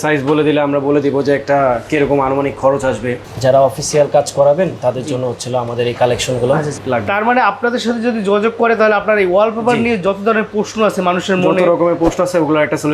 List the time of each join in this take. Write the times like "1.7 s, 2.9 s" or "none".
3.3 s, 6.8 s